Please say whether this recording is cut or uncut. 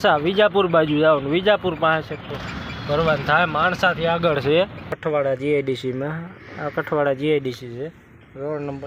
cut